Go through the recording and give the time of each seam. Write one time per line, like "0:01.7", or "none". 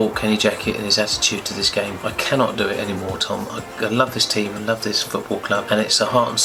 none